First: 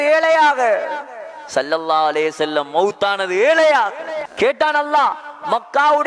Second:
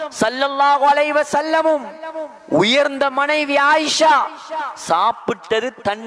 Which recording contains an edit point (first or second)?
first